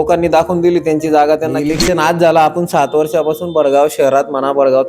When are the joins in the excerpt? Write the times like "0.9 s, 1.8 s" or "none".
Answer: 1.7 s